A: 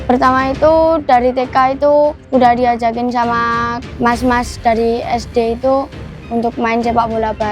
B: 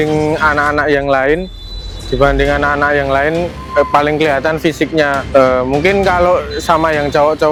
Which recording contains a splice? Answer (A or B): A